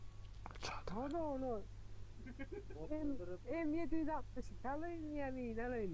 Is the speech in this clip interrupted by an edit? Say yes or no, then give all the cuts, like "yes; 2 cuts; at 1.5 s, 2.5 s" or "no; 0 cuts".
no; 0 cuts